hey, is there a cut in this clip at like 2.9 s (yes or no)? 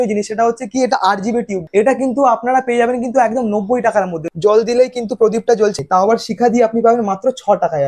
no